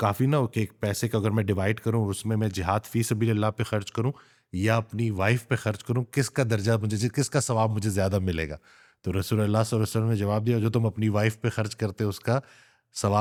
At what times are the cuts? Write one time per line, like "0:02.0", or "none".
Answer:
none

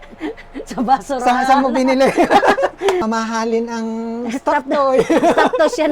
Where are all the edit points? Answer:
0:03.0

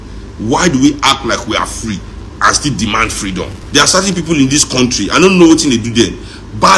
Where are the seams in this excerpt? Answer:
0:03.6

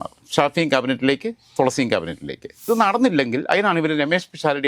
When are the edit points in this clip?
0:02.6

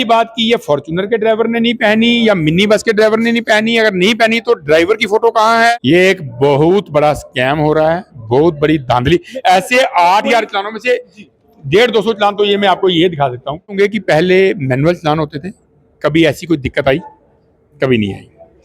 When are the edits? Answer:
0:05.8
0:13.8

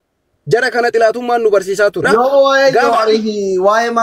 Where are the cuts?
0:02.0

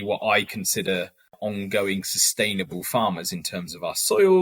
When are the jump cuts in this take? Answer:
0:01.3

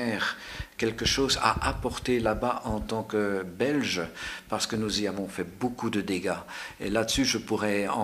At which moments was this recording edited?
none

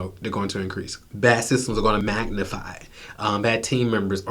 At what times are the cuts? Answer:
0:01.0
0:02.0

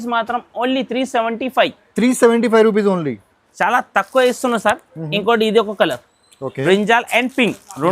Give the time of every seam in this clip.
0:03.4

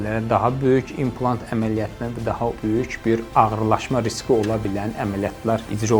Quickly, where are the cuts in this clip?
none

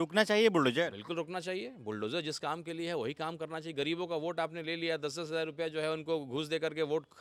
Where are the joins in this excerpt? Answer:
none

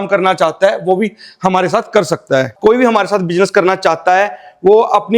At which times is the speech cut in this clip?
0:02.5

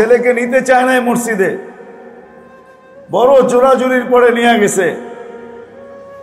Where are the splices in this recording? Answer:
0:05.3

